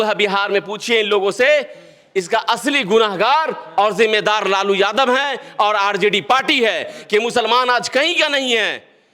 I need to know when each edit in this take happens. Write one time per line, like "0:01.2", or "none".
none